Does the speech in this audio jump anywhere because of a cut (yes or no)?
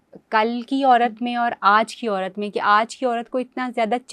no